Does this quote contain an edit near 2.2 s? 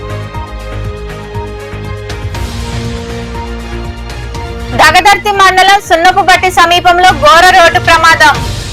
yes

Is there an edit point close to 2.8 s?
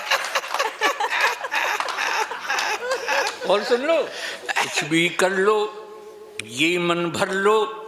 no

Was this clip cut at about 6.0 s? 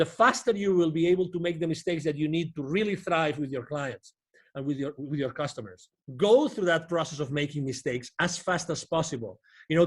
yes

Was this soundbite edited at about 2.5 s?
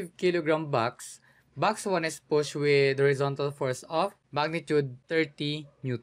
no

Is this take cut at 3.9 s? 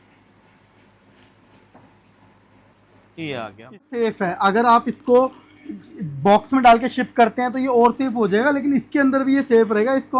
yes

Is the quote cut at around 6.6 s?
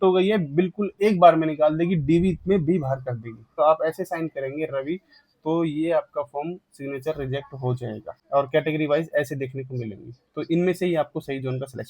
no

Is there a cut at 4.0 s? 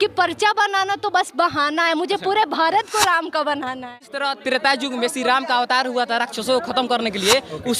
yes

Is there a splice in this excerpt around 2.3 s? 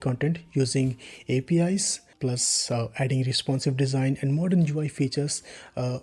yes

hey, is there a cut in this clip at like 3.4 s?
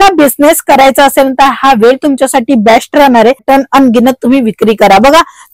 yes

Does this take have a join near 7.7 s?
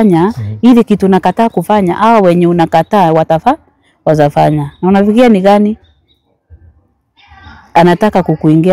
no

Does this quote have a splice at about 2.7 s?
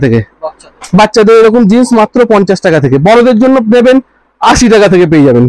no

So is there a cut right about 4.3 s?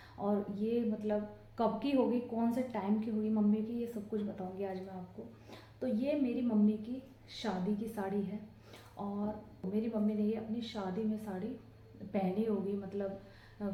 no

